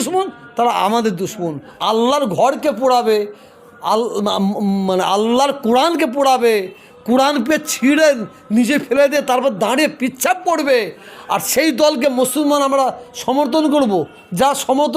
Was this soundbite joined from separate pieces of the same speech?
yes; 1 cut; at 1.7 s

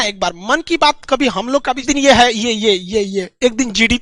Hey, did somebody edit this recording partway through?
yes; 1 cut; at 1.9 s

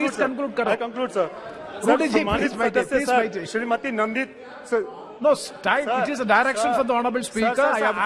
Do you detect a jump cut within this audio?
no; 0 cuts

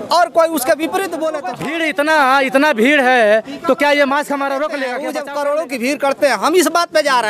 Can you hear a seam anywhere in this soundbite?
yes; 2 cuts; at 1.7 s, 5.1 s

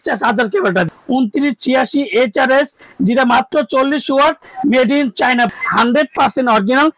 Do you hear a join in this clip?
yes; 2 cuts; at 1.0 s, 5.5 s

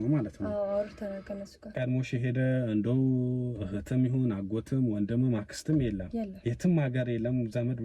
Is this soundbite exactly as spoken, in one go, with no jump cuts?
no; 1 cut; at 1.7 s

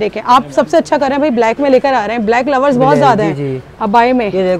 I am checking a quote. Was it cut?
no; 0 cuts

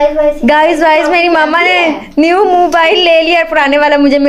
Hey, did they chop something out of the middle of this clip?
no; 0 cuts

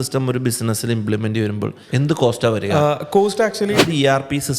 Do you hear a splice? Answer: yes; 2 cuts; at 1.8 s, 3.8 s

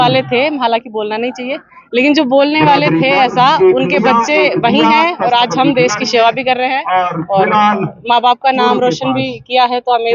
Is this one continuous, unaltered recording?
yes; 0 cuts

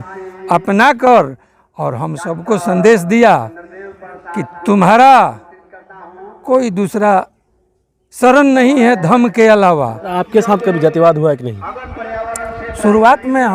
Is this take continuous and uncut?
no; 1 cut; at 10.2 s

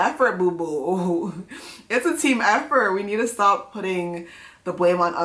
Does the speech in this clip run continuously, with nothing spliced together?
yes; 0 cuts

